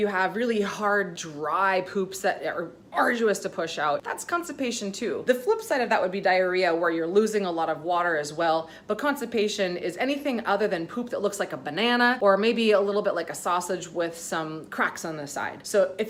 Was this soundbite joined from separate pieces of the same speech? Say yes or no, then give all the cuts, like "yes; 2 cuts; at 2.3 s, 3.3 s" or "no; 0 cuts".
no; 0 cuts